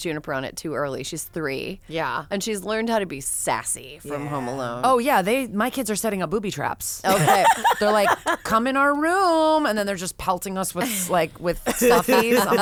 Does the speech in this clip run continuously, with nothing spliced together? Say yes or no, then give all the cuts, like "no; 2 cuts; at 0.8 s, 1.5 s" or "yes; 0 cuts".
yes; 0 cuts